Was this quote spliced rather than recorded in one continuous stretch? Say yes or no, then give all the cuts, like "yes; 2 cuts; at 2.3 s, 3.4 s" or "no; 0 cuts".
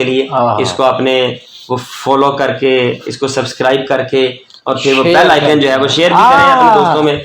no; 0 cuts